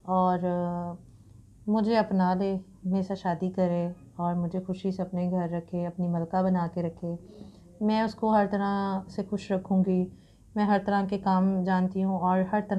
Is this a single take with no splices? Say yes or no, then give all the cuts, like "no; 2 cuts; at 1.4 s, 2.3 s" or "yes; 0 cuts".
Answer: yes; 0 cuts